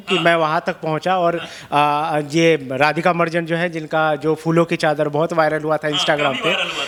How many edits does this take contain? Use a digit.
0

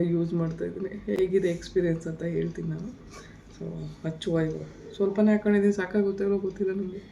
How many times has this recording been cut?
0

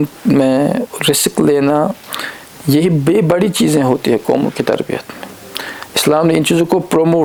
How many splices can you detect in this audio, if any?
0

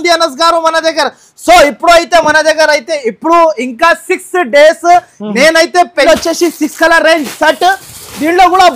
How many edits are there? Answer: 1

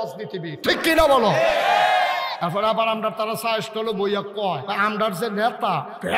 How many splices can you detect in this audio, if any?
2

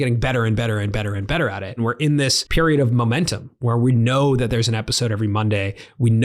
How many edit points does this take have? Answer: 1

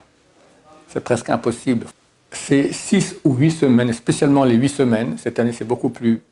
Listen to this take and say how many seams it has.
1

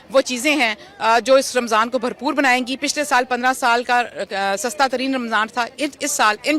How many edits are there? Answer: 0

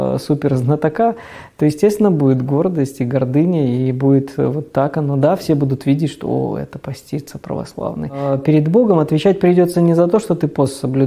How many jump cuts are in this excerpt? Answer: 1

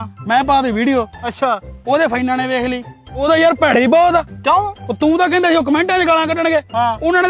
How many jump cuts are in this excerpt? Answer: 1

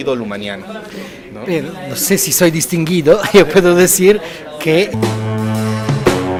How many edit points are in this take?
0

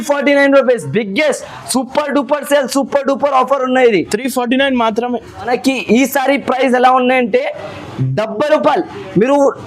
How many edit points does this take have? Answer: 1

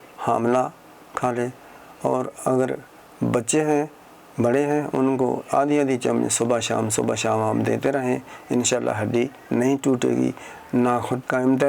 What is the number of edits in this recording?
0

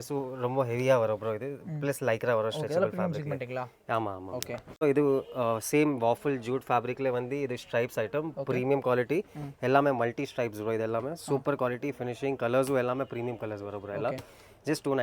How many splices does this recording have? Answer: 0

